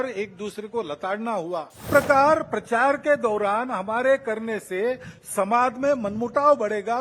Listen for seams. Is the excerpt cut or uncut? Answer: cut